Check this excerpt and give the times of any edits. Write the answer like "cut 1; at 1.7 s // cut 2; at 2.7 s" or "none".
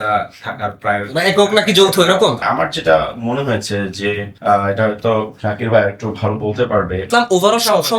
cut 1; at 2.4 s // cut 2; at 4.3 s // cut 3; at 7.0 s